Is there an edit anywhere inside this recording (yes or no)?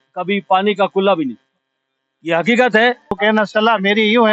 yes